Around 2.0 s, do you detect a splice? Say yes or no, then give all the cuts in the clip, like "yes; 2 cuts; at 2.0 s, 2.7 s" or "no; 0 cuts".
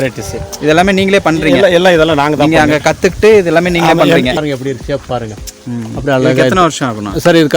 no; 1 cut; at 4.4 s